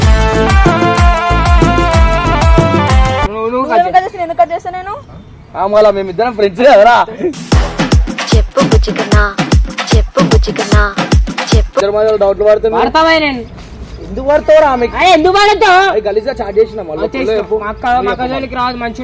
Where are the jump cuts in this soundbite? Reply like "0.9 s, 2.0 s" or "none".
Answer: 11.8 s